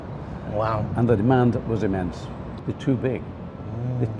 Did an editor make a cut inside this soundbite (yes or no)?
yes